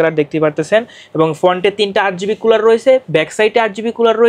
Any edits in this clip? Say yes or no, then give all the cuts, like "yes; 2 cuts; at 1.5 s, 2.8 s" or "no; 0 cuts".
no; 0 cuts